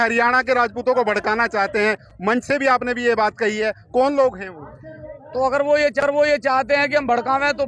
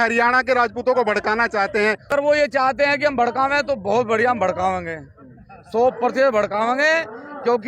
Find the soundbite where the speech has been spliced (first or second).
second